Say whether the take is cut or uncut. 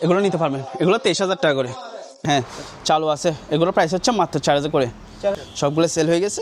cut